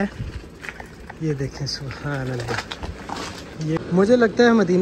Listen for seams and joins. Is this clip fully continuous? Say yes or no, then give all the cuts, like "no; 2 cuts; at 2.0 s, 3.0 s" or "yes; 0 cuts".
no; 1 cut; at 3.8 s